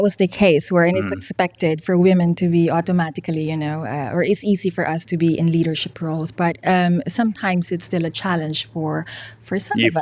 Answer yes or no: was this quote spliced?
no